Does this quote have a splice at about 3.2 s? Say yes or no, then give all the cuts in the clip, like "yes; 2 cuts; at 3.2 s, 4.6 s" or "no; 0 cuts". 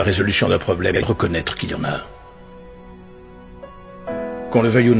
no; 1 cut; at 1.1 s